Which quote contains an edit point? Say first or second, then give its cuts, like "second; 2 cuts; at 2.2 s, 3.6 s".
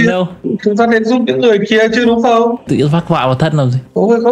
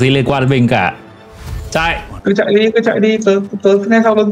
first; 1 cut; at 2.7 s